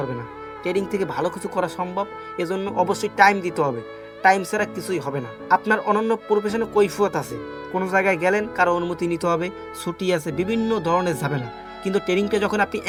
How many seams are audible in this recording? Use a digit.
0